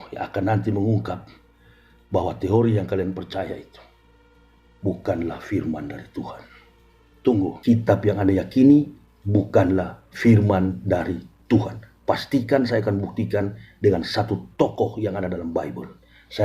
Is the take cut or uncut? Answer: cut